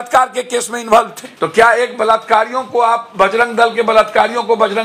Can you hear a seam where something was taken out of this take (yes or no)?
yes